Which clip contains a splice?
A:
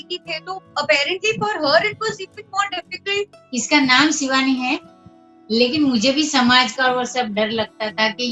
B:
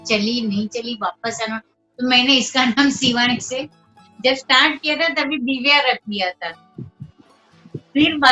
A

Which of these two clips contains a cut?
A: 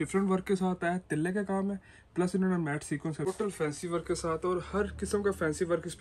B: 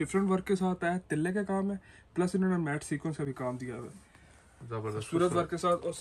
A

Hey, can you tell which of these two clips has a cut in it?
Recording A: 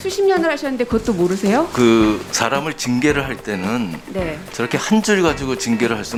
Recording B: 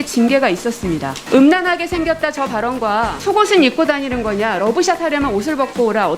B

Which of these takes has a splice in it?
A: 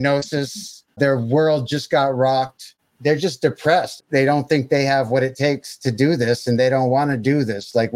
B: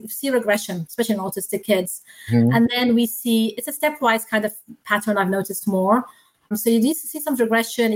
A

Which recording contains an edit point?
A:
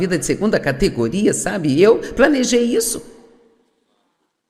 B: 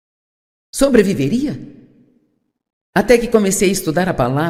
A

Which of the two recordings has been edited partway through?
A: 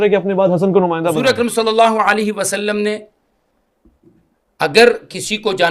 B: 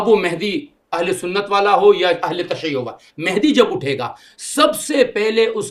A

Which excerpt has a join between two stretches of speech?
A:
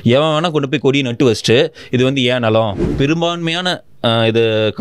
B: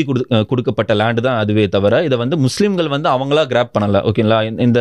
A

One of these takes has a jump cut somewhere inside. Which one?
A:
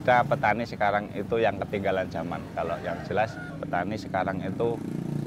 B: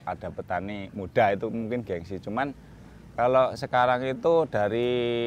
A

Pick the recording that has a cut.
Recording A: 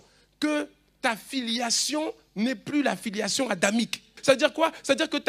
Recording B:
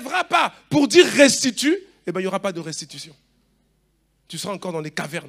A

